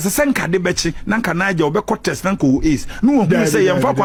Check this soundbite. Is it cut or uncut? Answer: uncut